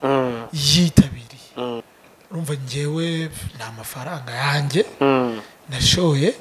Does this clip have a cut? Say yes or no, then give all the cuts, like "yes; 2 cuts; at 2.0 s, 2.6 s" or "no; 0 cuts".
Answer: yes; 1 cut; at 1.9 s